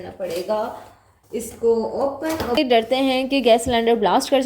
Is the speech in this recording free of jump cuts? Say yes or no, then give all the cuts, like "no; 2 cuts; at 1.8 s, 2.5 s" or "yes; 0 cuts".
no; 1 cut; at 2.9 s